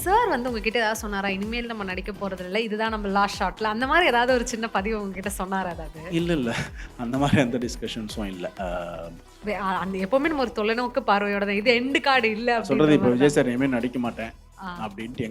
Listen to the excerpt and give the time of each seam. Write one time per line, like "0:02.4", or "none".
0:09.4